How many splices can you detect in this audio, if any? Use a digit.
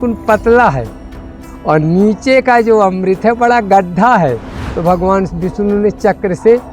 1